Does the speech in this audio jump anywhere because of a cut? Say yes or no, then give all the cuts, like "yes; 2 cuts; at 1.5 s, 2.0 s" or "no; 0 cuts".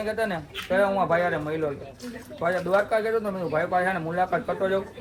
no; 0 cuts